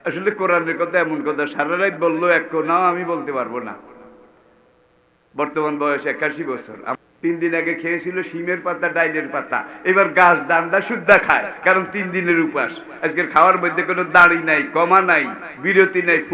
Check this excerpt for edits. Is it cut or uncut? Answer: cut